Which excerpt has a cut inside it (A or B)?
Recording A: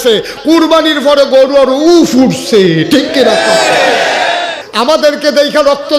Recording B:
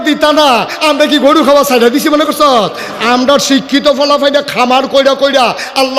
A